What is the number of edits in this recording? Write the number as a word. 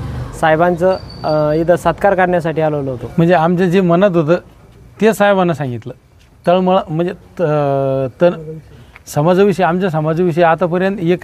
one